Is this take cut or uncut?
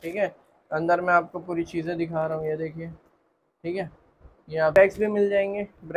cut